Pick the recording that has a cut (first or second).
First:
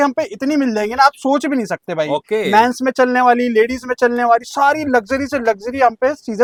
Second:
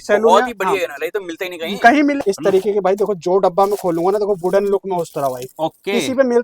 second